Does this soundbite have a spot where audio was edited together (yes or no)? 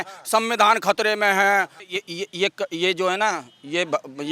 yes